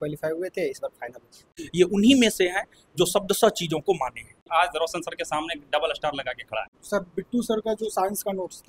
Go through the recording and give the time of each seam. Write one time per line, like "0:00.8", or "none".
0:01.6
0:04.4
0:06.8